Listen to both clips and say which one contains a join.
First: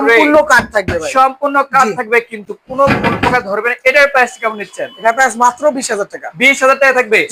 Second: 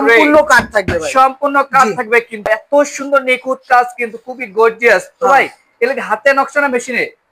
second; 1 cut; at 2.5 s

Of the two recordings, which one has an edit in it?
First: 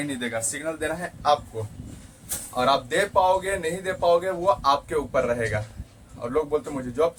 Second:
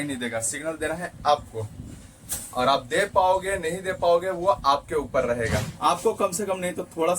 second; 1 cut; at 5.7 s

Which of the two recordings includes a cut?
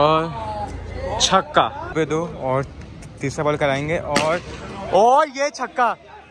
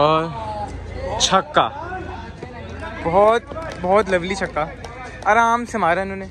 first; 1 cut; at 1.8 s

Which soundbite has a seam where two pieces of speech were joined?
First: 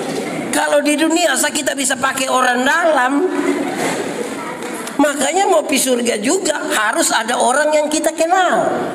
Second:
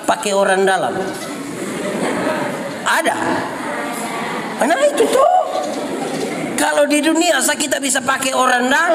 first; 1 cut; at 3.9 s

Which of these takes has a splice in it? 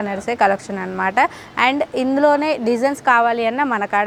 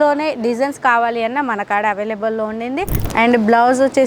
second; 1 cut; at 3.0 s

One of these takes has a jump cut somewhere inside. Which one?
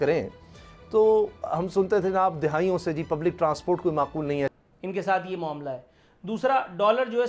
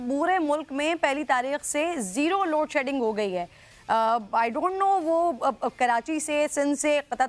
first; 1 cut; at 4.5 s

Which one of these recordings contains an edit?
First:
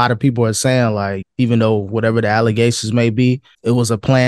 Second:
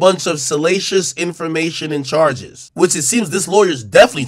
second; 1 cut; at 2.6 s

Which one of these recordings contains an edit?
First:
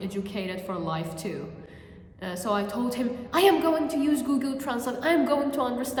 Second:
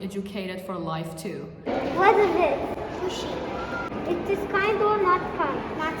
second; 2 cuts; at 1.7 s, 3.9 s

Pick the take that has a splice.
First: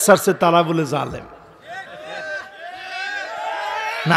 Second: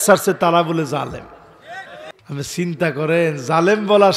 second; 1 cut; at 2.0 s

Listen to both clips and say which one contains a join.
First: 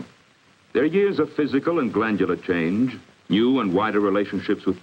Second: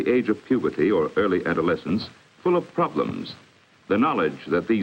second; 1 cut; at 3.8 s

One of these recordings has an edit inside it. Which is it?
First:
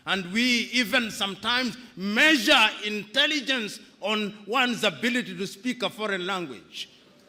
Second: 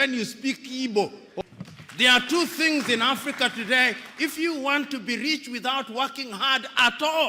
second; 1 cut; at 1.4 s

